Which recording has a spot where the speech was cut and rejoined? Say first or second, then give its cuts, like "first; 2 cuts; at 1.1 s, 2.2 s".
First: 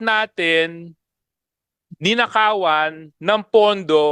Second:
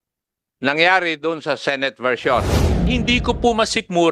second; 1 cut; at 2.8 s